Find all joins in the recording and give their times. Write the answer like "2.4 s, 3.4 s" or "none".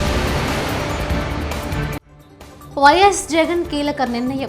2.1 s